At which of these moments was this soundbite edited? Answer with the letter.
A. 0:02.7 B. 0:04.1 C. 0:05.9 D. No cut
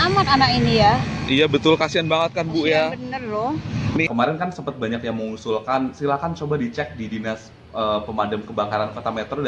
B